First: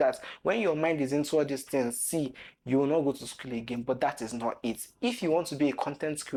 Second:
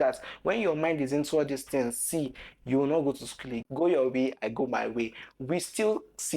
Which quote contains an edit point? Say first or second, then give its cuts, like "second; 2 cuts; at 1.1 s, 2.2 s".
second; 1 cut; at 3.7 s